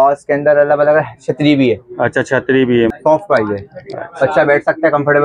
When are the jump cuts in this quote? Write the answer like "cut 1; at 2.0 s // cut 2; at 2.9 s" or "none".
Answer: cut 1; at 2.9 s